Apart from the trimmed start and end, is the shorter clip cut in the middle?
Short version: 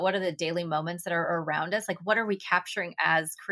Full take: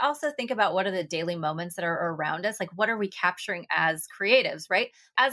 no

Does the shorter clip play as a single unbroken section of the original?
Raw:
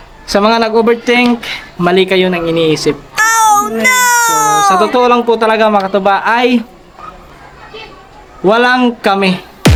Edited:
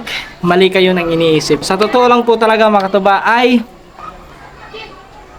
no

